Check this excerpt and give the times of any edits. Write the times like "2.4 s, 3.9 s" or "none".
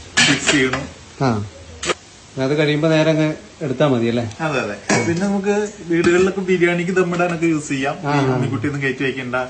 1.9 s